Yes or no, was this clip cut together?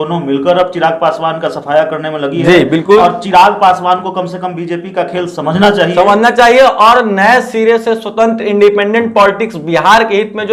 no